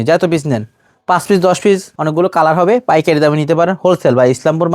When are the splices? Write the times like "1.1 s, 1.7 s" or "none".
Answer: 1.9 s